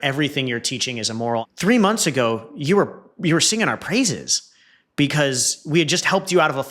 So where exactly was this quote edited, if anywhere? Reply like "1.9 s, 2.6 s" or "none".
1.4 s